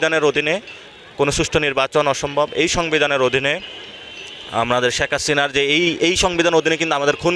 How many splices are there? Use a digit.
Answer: 0